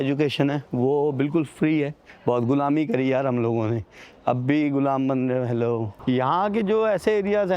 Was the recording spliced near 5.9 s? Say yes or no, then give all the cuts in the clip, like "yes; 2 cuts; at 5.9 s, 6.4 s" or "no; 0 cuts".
yes; 2 cuts; at 2.0 s, 5.9 s